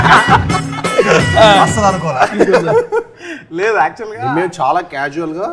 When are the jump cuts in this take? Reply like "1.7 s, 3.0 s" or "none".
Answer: none